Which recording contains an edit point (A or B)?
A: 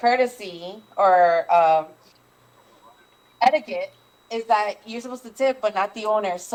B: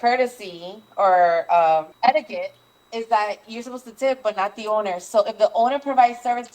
B